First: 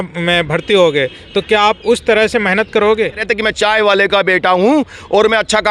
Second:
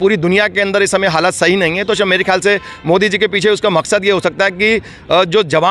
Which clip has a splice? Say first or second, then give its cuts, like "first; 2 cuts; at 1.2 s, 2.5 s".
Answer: first; 1 cut; at 3.2 s